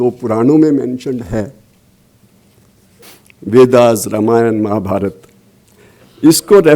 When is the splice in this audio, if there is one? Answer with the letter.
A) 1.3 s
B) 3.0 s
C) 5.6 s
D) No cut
B